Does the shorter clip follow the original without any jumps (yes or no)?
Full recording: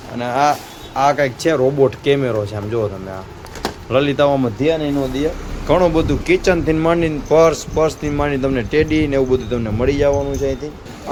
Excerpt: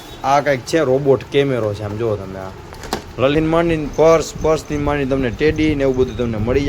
no